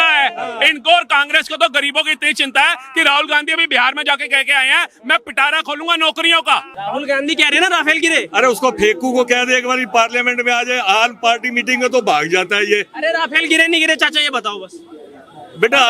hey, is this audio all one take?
no; 1 cut; at 6.7 s

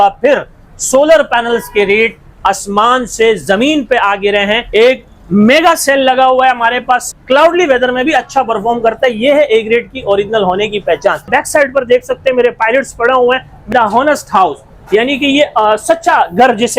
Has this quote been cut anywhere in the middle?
yes; 4 cuts; at 4.6 s, 7.1 s, 11.2 s, 13.7 s

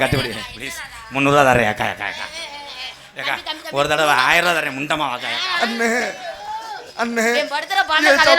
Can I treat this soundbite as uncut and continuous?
yes; 0 cuts

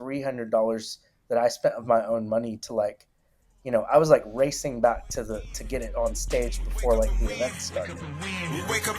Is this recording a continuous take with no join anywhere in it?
no; 1 cut; at 8.0 s

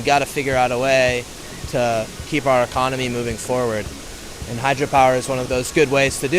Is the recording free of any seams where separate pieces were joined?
no; 2 cuts; at 2.2 s, 5.4 s

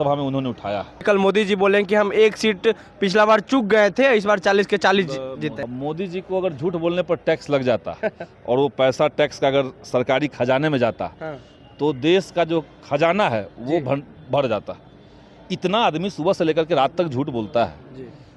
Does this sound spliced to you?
yes; 2 cuts; at 1.0 s, 5.6 s

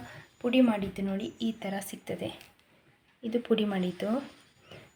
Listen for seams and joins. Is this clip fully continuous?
yes; 0 cuts

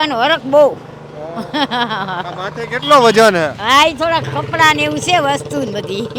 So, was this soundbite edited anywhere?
no; 0 cuts

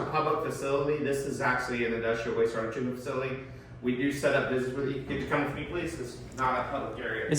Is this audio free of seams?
yes; 0 cuts

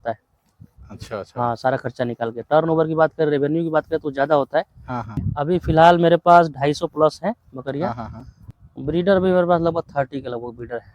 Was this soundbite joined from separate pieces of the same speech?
yes; 2 cuts; at 5.1 s, 8.4 s

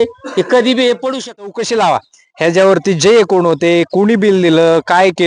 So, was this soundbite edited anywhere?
yes; 1 cut; at 1.6 s

